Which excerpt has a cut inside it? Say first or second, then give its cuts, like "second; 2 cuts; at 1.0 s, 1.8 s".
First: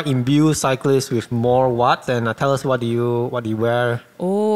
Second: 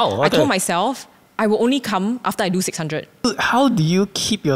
second; 1 cut; at 3.3 s